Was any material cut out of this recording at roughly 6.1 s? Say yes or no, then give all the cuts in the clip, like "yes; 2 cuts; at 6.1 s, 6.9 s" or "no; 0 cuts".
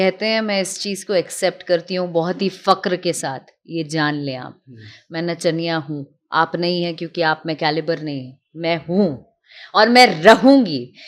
no; 0 cuts